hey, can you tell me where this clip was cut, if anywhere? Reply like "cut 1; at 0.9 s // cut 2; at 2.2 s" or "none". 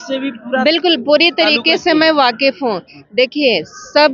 none